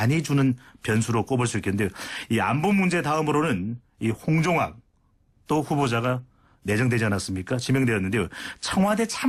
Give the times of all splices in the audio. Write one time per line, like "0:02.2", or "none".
none